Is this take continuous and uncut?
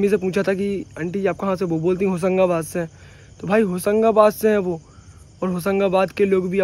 yes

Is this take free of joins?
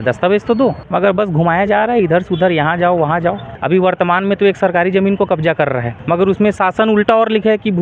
no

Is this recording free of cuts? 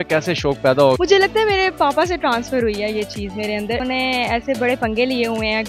no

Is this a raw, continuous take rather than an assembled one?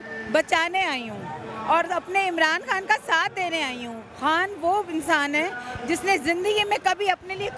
yes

